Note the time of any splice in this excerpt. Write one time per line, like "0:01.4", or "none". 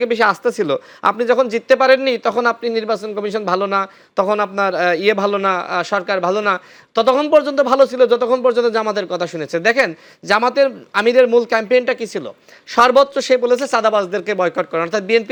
none